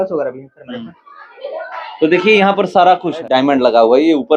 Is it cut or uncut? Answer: cut